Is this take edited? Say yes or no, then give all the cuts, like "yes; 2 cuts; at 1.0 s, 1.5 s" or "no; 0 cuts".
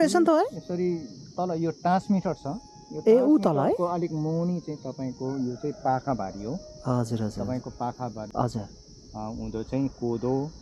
yes; 1 cut; at 8.3 s